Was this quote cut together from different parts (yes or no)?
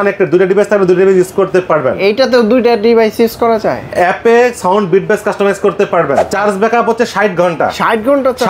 yes